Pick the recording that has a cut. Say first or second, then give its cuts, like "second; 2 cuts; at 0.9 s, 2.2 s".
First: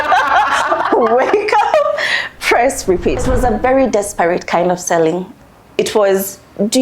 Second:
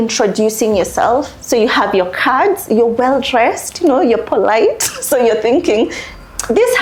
first; 2 cuts; at 3.3 s, 5.3 s